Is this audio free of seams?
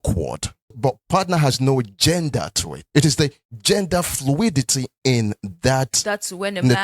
no; 2 cuts; at 1.0 s, 4.7 s

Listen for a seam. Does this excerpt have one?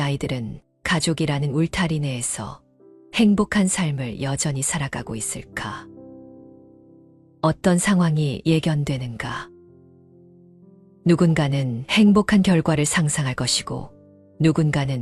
no; 0 cuts

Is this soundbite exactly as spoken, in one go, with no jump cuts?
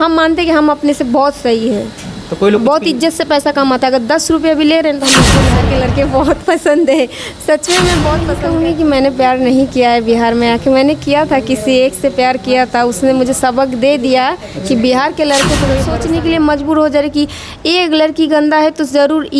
no; 3 cuts; at 5.4 s, 8.3 s, 15.9 s

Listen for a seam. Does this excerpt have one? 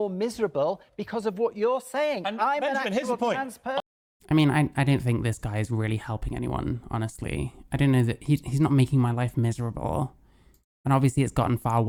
no; 0 cuts

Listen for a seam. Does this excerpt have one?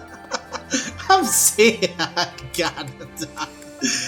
no; 0 cuts

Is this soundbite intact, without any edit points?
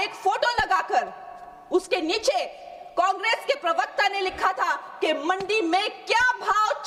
yes; 0 cuts

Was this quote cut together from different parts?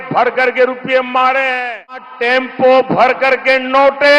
yes; 1 cut; at 2.1 s

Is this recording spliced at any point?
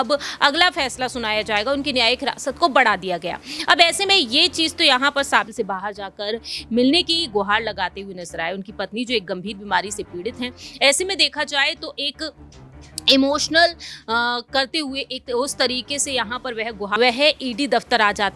yes; 2 cuts; at 5.5 s, 17.0 s

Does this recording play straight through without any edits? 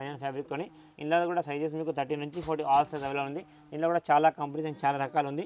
yes; 0 cuts

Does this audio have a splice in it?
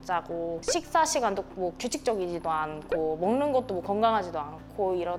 no; 0 cuts

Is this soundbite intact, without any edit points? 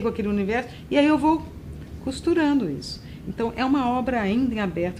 yes; 0 cuts

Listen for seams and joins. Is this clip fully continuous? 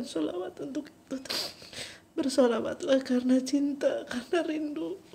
no; 1 cut; at 1.3 s

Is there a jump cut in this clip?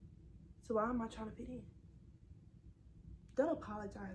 yes; 1 cut; at 3.2 s

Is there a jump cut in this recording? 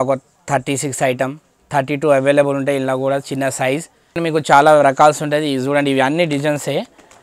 yes; 1 cut; at 4.2 s

